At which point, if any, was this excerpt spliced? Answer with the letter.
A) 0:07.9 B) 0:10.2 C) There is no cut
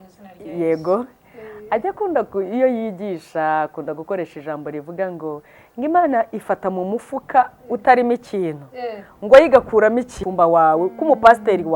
B